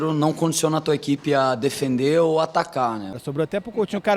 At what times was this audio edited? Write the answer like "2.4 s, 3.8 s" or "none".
3.2 s